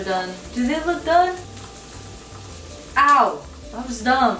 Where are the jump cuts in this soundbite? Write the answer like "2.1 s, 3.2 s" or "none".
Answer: none